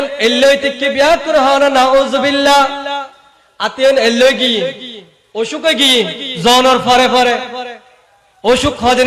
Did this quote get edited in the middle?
no; 0 cuts

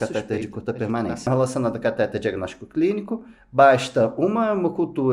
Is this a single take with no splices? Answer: no; 1 cut; at 1.3 s

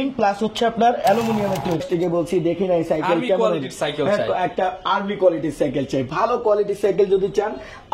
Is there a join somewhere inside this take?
yes; 1 cut; at 1.9 s

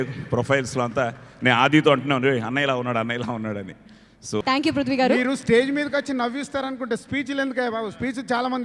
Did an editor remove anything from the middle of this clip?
yes; 1 cut; at 4.4 s

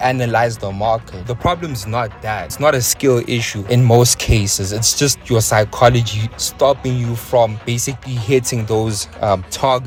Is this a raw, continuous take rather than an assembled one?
yes; 0 cuts

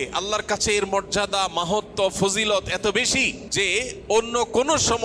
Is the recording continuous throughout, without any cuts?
no; 1 cut; at 3.4 s

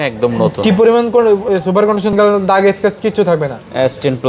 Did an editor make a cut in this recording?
yes; 1 cut; at 2.1 s

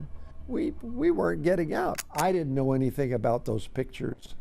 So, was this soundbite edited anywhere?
yes; 1 cut; at 2.0 s

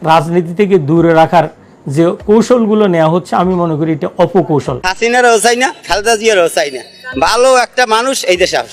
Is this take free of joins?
no; 1 cut; at 4.8 s

